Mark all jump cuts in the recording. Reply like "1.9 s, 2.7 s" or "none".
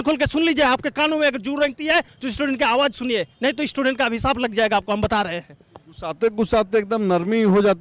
none